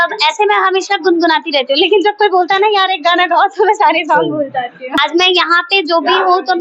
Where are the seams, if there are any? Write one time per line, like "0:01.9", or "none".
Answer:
0:04.9